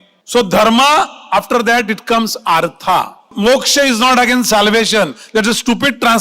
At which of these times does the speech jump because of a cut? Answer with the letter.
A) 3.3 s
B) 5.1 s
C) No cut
A